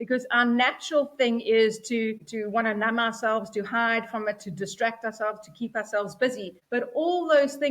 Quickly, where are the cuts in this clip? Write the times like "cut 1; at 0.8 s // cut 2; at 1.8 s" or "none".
cut 1; at 2.3 s // cut 2; at 6.5 s

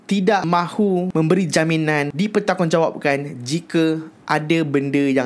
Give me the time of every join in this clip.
cut 1; at 2.1 s

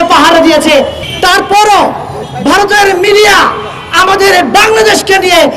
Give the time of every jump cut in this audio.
cut 1; at 1.0 s

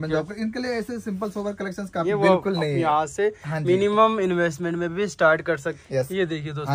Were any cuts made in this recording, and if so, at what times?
cut 1; at 2.0 s // cut 2; at 5.7 s

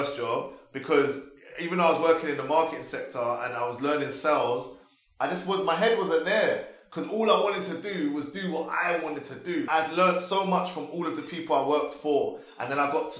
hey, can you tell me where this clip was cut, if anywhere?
cut 1; at 9.7 s

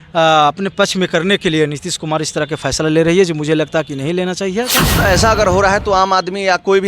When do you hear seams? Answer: cut 1; at 4.9 s

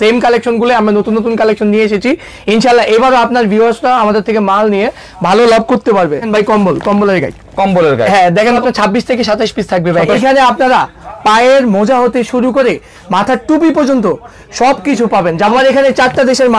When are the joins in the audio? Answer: cut 1; at 6.3 s // cut 2; at 8.6 s // cut 3; at 10.1 s // cut 4; at 15.5 s

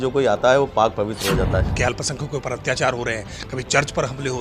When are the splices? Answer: cut 1; at 1.7 s

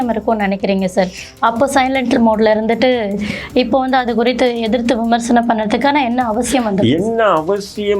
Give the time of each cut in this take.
none

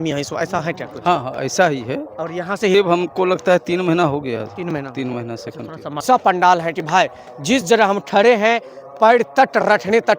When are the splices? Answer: cut 1; at 2.7 s // cut 2; at 6.0 s

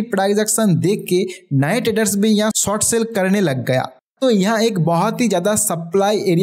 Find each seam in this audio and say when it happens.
none

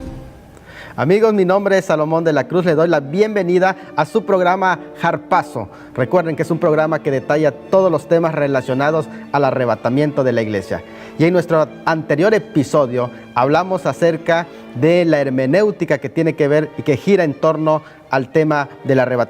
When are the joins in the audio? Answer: cut 1; at 4.5 s

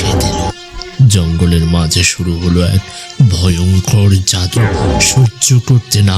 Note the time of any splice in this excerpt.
cut 1; at 4.6 s

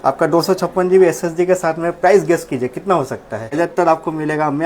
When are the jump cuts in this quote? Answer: cut 1; at 3.6 s

